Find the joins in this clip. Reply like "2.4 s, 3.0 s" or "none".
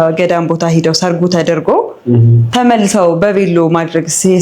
none